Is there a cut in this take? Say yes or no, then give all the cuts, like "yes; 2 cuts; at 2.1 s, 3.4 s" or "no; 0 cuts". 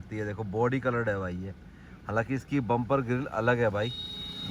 no; 0 cuts